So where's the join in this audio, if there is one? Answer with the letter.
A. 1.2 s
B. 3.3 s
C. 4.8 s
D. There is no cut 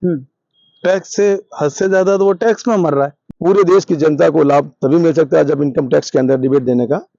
B